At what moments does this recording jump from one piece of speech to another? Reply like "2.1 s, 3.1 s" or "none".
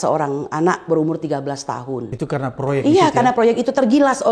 none